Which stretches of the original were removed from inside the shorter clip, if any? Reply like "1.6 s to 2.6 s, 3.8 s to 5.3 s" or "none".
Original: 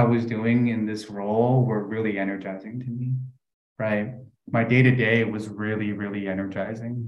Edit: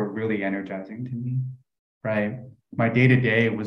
none